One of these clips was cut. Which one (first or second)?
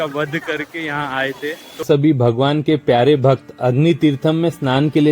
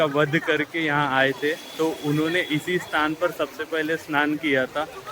first